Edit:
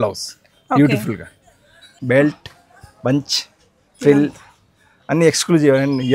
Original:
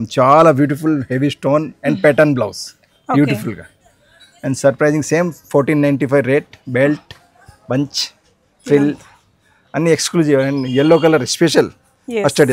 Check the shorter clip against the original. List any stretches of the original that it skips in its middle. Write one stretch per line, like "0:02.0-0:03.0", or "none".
0:04.3-0:06.6